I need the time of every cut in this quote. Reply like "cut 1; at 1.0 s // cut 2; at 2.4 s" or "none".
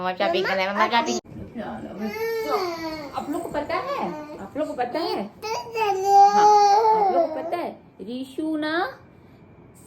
cut 1; at 1.2 s

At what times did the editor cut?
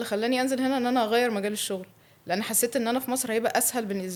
none

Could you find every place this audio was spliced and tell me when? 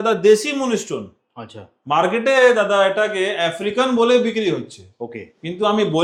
none

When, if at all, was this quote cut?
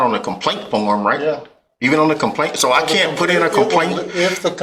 none

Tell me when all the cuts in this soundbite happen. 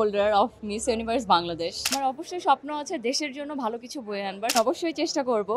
cut 1; at 1.9 s // cut 2; at 4.5 s

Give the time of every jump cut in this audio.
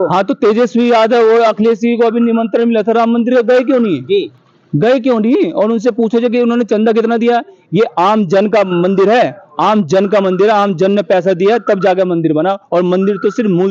none

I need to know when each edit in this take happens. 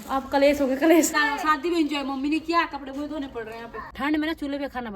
cut 1; at 1.2 s // cut 2; at 3.8 s

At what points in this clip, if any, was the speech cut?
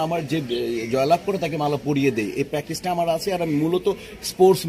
none

